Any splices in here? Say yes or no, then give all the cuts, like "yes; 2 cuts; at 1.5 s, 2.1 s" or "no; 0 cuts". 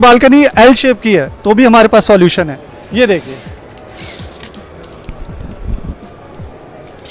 no; 0 cuts